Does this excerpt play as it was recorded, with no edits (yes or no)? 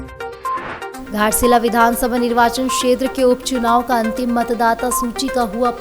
no